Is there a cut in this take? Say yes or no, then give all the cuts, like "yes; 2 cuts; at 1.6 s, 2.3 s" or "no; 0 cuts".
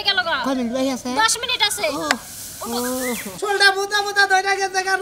yes; 1 cut; at 3.3 s